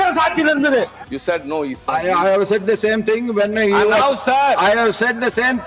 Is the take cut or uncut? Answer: cut